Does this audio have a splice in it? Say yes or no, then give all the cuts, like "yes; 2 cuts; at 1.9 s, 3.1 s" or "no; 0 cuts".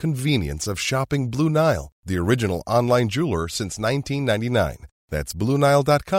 no; 0 cuts